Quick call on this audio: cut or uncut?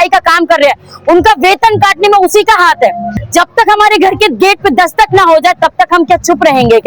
cut